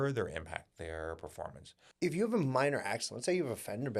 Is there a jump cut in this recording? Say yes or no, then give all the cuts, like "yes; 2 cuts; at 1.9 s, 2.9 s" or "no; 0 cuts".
yes; 1 cut; at 1.9 s